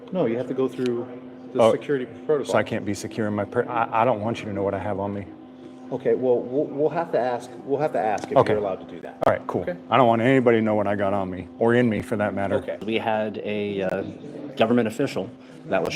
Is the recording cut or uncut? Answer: cut